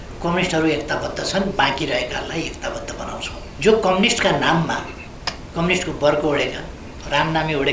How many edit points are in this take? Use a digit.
1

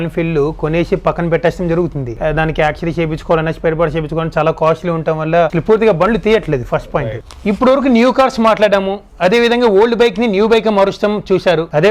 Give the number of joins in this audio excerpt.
2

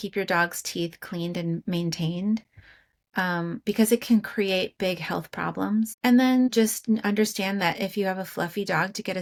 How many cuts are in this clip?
0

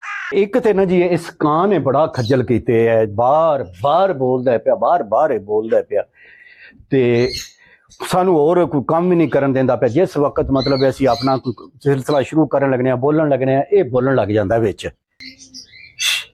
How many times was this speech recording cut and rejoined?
0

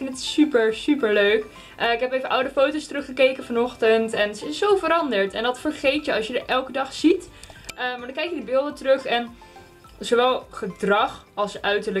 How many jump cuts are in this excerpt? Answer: 0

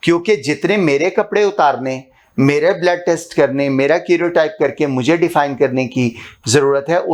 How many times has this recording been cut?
0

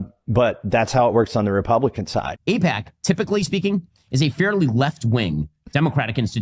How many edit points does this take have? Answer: 1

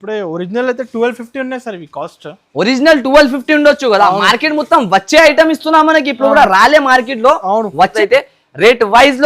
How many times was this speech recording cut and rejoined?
1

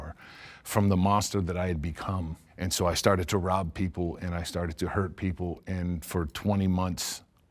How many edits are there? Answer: 1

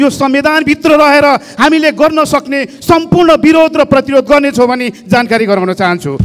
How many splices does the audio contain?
0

